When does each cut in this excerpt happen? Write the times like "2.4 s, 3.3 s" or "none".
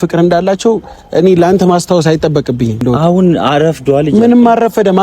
2.8 s